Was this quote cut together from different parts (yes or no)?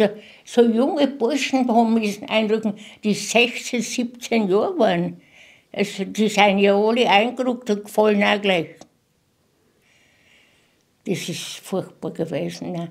no